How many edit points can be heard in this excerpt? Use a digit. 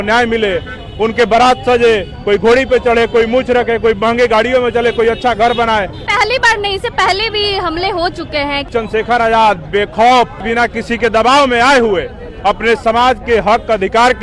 3